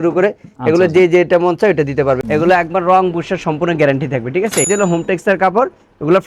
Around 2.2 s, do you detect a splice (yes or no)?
yes